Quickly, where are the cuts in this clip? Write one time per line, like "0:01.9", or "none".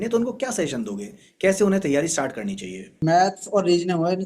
0:02.9